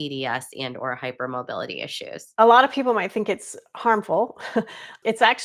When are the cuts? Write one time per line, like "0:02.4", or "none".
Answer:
none